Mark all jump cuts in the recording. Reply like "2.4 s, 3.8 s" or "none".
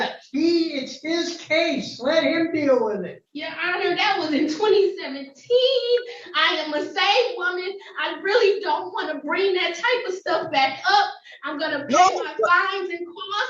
3.1 s